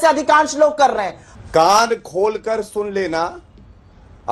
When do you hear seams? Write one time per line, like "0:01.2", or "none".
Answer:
0:01.2